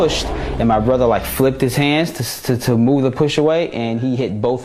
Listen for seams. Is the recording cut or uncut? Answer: uncut